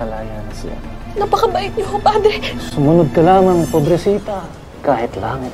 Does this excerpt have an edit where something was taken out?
no; 0 cuts

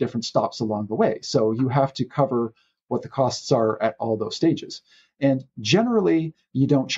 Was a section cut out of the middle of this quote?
no; 0 cuts

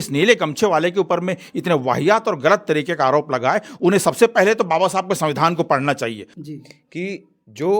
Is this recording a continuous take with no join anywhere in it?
no; 1 cut; at 6.3 s

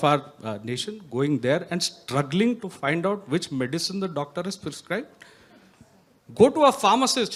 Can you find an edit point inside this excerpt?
no; 0 cuts

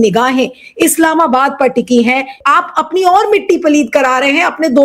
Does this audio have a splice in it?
yes; 1 cut; at 2.4 s

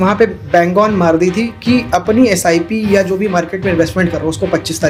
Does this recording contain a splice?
no; 0 cuts

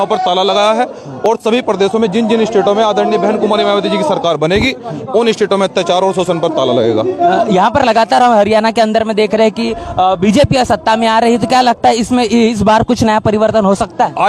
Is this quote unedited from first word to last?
yes; 0 cuts

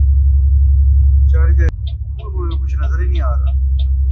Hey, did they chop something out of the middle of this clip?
yes; 1 cut; at 1.7 s

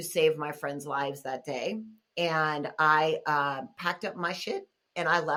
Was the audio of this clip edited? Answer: no; 0 cuts

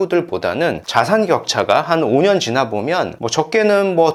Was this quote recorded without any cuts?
yes; 0 cuts

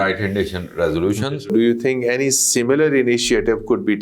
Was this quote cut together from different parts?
yes; 1 cut; at 1.3 s

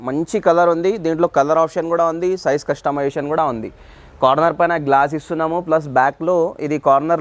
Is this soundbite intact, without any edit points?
yes; 0 cuts

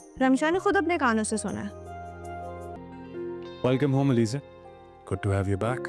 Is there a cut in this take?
yes; 1 cut; at 2.8 s

